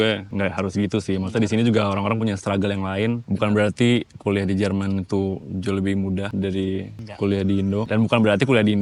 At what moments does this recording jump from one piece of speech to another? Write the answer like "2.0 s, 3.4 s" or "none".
none